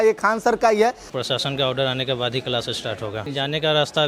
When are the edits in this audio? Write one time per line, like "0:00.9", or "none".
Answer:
0:01.1
0:03.2